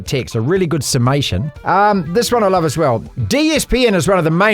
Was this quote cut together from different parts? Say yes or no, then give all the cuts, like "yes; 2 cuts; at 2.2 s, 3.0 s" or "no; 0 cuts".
yes; 2 cuts; at 1.5 s, 3.1 s